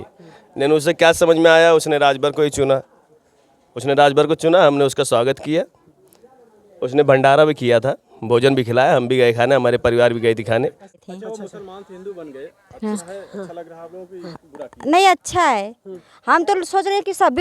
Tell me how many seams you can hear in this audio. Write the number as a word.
one